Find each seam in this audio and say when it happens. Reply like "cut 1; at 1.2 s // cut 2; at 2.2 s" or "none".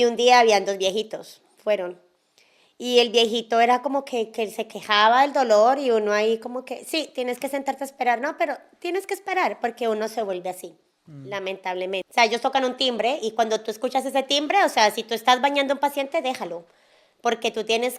cut 1; at 12.1 s